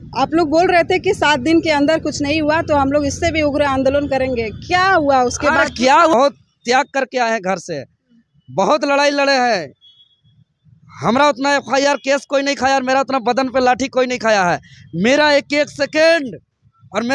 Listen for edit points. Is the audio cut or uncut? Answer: cut